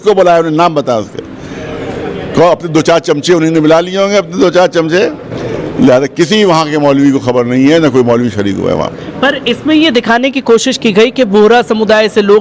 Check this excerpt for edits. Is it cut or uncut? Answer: uncut